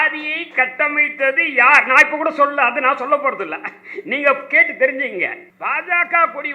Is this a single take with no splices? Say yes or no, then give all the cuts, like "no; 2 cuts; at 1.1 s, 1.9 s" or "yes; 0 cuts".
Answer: no; 1 cut; at 5.5 s